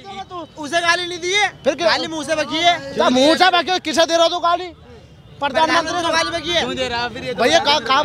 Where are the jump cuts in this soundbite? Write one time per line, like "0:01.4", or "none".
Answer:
none